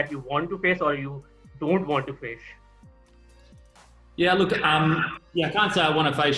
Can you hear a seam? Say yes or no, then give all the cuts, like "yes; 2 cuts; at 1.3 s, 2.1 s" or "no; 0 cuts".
no; 0 cuts